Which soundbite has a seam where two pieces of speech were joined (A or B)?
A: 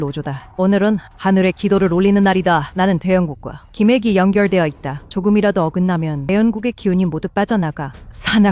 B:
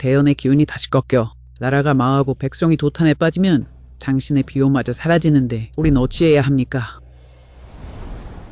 A